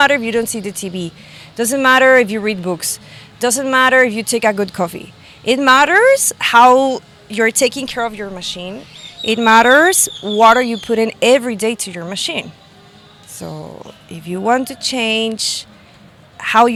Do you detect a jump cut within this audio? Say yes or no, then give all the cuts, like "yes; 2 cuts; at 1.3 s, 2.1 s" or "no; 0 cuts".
no; 0 cuts